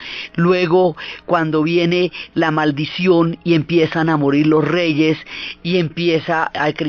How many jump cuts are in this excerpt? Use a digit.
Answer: 1